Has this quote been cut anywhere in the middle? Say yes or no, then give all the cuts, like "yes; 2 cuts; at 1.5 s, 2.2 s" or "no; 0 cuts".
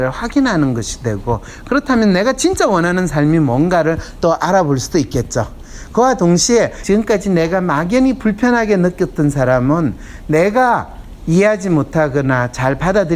yes; 1 cut; at 6.8 s